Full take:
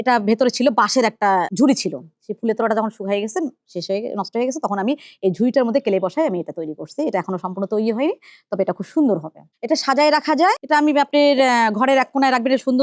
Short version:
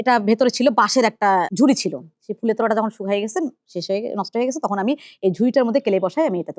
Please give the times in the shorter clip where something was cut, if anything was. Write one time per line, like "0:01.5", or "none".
none